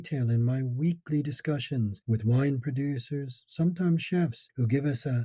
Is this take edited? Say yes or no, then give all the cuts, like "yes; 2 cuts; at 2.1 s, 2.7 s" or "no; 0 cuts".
no; 0 cuts